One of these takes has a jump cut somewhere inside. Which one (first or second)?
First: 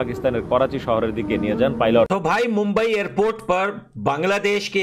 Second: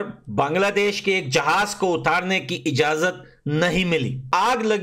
first